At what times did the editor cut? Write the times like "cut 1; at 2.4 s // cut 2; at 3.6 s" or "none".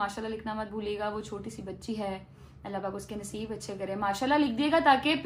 none